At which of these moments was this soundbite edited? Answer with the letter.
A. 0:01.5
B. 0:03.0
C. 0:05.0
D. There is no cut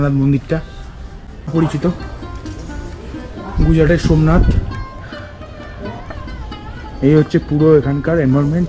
A